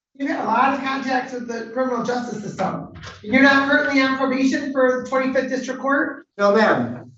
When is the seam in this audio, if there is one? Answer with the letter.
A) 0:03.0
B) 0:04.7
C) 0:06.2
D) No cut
C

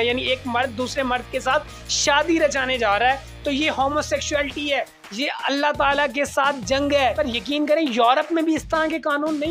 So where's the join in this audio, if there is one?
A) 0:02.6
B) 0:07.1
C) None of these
B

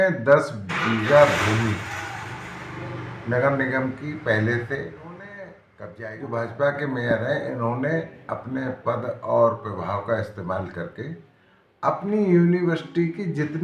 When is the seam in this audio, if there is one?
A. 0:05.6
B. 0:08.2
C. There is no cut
A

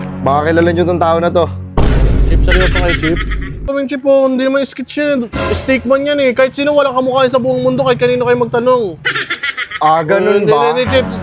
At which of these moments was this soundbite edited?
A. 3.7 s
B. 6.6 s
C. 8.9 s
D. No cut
A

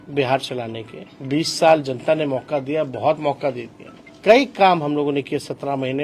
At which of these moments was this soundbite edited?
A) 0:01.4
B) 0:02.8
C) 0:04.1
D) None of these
C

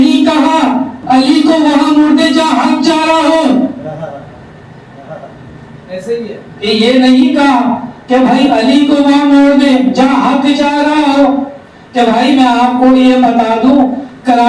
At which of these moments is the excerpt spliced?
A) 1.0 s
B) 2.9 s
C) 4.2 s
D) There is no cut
A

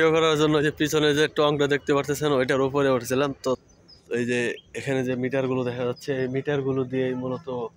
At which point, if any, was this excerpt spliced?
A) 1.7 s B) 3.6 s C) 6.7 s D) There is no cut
B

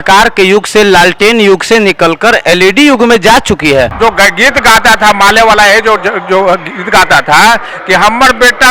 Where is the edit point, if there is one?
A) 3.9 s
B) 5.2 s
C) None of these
A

